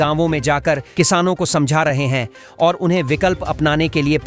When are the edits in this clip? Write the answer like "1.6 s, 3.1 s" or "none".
none